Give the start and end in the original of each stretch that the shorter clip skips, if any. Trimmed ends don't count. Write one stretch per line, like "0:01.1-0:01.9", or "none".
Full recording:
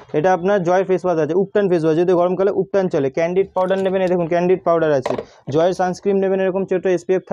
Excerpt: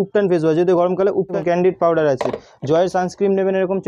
0:02.8-0:04.2

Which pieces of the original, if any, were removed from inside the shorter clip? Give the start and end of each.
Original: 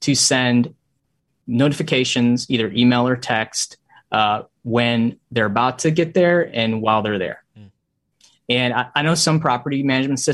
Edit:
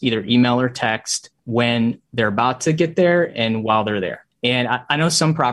0:03.8-0:04.5
0:07.4-0:08.3

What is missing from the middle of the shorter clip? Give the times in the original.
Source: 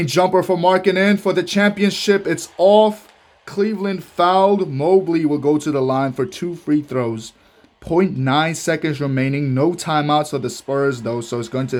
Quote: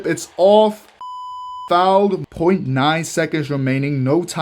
0:03.5-0:03.8
0:04.7-0:07.8

